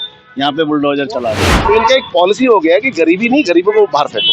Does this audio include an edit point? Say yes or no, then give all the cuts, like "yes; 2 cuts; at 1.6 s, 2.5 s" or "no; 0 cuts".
yes; 1 cut; at 1.5 s